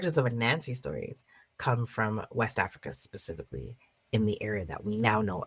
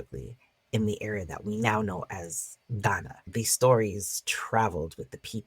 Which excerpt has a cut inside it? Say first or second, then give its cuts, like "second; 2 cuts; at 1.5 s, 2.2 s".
second; 1 cut; at 3.3 s